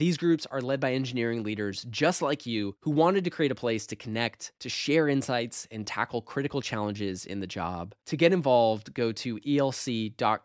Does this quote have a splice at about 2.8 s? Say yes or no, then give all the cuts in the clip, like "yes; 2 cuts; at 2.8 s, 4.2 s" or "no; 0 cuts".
no; 0 cuts